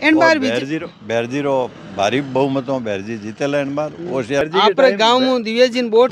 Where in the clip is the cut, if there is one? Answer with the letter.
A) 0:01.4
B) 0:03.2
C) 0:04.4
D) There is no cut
C